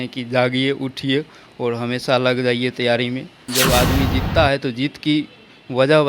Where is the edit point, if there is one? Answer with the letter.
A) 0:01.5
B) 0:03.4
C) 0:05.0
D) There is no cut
B